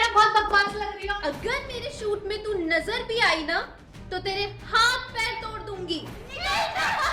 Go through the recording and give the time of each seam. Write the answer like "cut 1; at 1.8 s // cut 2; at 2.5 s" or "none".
cut 1; at 1.1 s // cut 2; at 6.2 s